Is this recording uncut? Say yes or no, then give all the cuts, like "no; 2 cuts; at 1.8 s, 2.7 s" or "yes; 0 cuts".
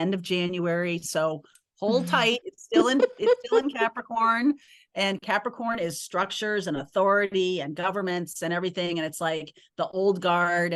yes; 0 cuts